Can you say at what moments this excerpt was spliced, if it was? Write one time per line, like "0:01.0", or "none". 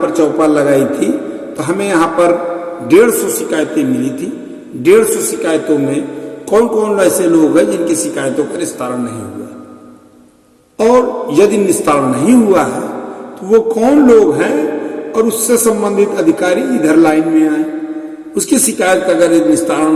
0:18.3